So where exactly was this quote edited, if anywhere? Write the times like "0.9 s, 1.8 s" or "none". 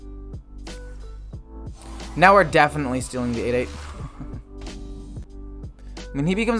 5.4 s